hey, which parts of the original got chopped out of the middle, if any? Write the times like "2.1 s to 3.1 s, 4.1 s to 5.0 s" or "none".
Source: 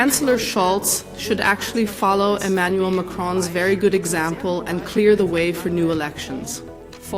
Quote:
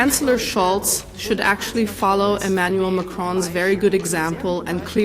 none